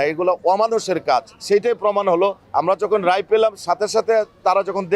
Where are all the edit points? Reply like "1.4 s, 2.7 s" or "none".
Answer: 2.4 s